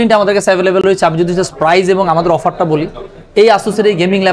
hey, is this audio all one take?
yes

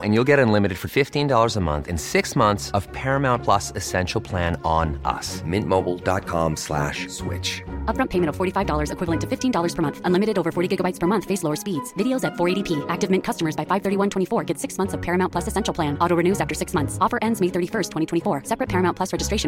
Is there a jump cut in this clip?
no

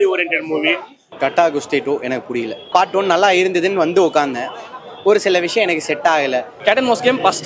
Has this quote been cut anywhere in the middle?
yes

